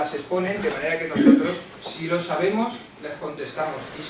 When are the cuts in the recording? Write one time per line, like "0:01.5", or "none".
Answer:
0:01.5